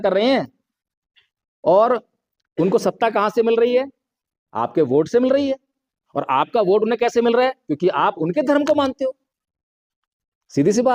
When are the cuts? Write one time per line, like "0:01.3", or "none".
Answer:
none